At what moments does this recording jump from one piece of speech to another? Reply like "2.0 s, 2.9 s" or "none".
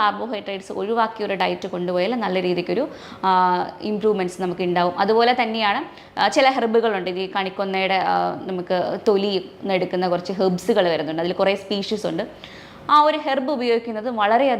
none